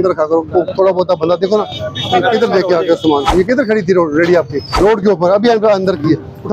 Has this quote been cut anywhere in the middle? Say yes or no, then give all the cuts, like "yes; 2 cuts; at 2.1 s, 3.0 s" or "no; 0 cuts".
yes; 2 cuts; at 3.3 s, 4.7 s